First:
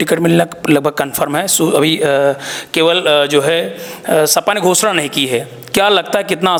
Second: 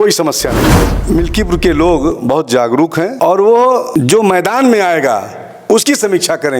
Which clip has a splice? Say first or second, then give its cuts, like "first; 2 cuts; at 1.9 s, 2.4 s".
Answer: second; 3 cuts; at 0.9 s, 3.1 s, 3.9 s